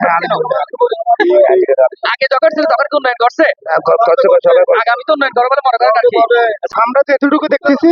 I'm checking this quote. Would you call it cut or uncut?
cut